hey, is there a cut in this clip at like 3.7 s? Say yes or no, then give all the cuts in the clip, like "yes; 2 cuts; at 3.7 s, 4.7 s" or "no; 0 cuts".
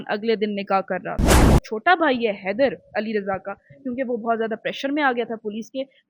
no; 1 cut; at 1.5 s